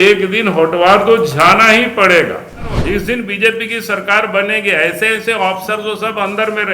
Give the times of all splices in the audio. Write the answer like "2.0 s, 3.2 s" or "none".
2.8 s